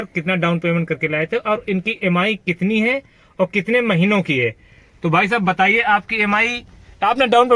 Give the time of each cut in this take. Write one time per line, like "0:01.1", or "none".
none